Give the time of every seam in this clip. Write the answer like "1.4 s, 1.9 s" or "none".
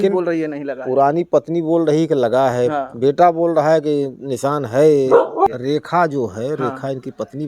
5.5 s

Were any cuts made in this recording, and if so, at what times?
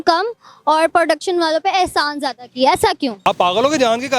3.3 s

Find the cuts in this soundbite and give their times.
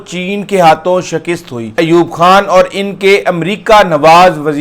1.7 s

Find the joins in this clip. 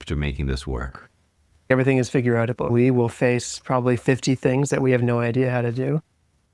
1.7 s, 2.7 s

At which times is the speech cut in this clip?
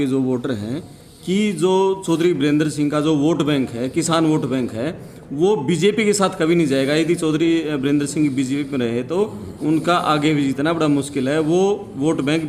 none

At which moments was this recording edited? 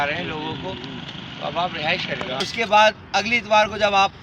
2.5 s

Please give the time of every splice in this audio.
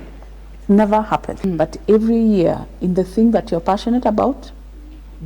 1.5 s

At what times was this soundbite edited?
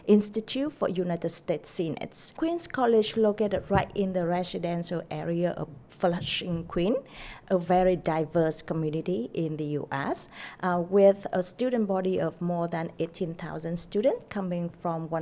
2.3 s

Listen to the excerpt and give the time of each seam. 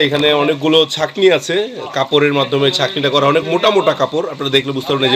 none

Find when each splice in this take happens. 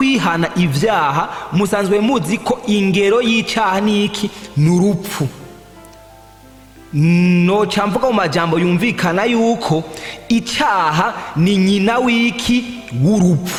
none

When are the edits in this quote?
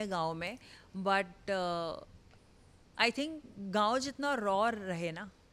none

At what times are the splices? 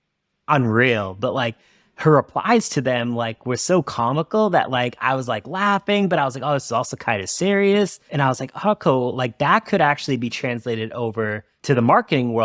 8.1 s, 11.5 s

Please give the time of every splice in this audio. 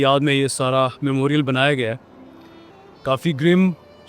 none

